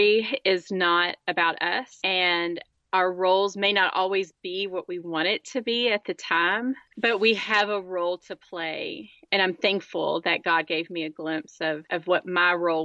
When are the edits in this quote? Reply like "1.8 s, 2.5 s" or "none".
none